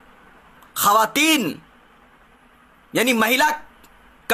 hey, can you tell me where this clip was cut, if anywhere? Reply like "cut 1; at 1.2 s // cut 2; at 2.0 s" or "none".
none